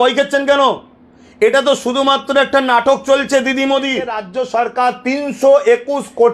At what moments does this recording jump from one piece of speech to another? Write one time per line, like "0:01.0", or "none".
0:04.3